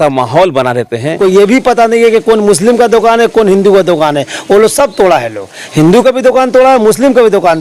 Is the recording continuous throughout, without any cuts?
no; 1 cut; at 1.2 s

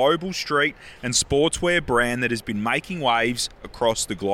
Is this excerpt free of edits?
yes; 0 cuts

